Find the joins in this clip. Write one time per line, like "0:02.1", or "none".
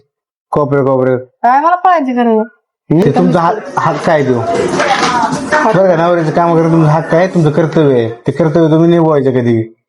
0:03.0

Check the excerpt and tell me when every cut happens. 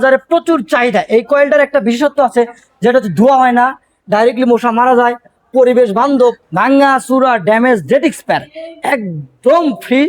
0:06.4

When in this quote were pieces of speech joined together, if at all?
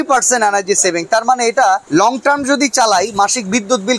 0:01.8

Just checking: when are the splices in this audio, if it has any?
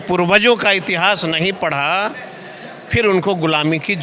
none

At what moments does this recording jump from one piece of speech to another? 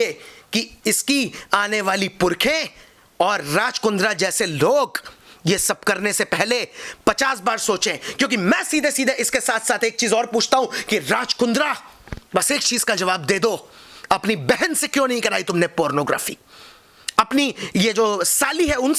none

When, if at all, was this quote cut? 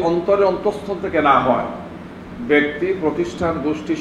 none

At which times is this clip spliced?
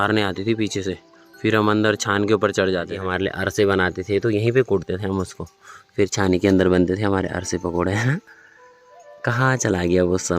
0:03.0

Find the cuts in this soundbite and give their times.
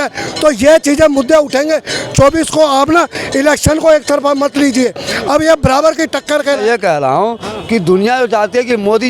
0:06.6

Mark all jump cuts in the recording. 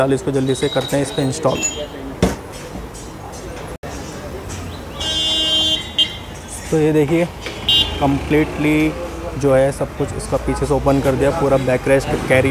none

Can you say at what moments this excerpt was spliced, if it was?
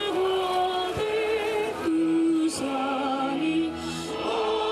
0:00.9

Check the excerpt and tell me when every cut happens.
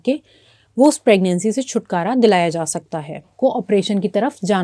0:03.3

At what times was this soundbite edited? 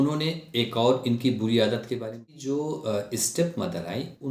0:02.0

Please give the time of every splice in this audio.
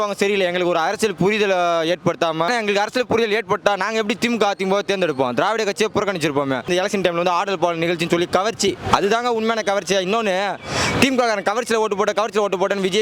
0:02.5
0:06.7

